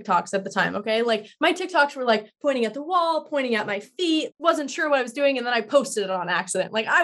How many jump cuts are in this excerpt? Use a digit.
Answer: 1